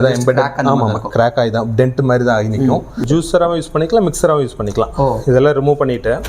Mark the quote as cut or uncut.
cut